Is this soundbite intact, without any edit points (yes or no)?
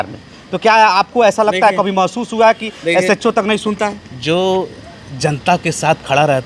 yes